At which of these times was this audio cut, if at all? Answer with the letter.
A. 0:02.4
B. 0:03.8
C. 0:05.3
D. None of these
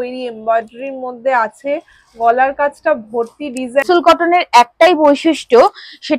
B